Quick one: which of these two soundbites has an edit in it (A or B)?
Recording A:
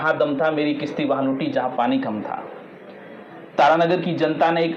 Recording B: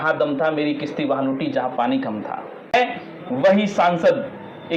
B